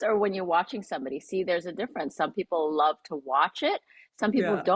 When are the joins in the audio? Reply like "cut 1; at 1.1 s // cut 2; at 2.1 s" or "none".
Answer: none

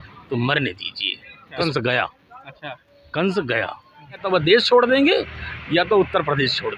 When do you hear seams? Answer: cut 1; at 1.5 s // cut 2; at 4.2 s

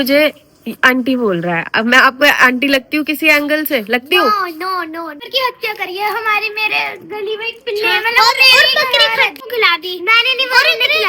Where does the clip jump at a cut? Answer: cut 1; at 5.1 s // cut 2; at 9.4 s

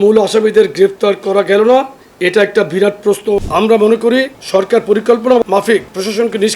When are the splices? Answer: cut 1; at 3.4 s // cut 2; at 4.4 s // cut 3; at 5.4 s

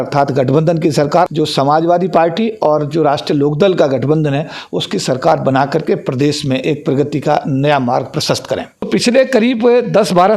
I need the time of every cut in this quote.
cut 1; at 1.3 s // cut 2; at 8.9 s

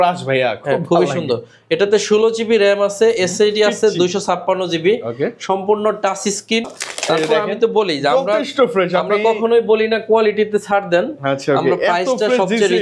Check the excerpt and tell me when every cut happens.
cut 1; at 6.8 s

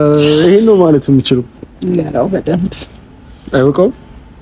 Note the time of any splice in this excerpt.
none

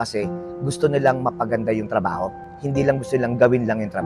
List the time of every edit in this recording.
none

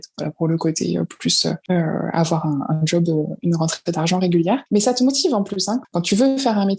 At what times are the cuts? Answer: cut 1; at 1.6 s // cut 2; at 4.6 s // cut 3; at 5.9 s

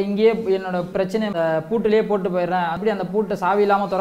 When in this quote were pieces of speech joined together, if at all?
cut 1; at 1.1 s // cut 2; at 2.8 s

